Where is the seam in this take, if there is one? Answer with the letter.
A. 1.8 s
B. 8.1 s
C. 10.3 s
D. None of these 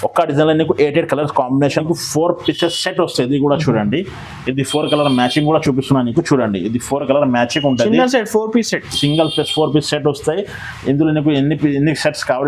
A